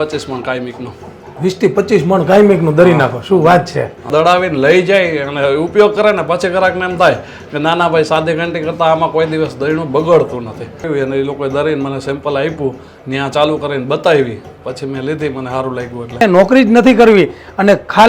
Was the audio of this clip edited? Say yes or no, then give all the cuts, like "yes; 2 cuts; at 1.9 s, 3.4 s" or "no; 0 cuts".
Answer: yes; 3 cuts; at 4.0 s, 10.9 s, 16.2 s